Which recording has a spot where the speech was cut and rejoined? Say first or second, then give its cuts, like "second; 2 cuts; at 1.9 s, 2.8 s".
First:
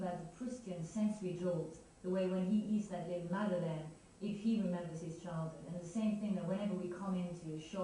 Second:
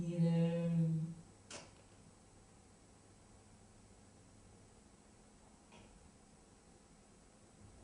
first; 1 cut; at 4.9 s